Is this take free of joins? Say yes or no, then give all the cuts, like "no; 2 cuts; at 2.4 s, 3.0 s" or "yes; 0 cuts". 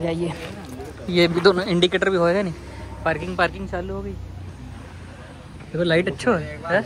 yes; 0 cuts